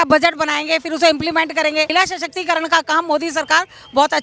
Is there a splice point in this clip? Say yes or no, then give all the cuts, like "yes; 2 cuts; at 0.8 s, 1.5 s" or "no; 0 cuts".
yes; 1 cut; at 1.9 s